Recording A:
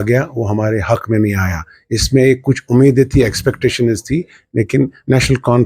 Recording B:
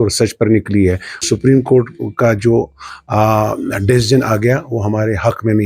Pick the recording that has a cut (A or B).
B